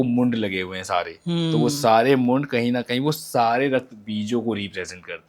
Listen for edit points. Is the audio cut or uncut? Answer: uncut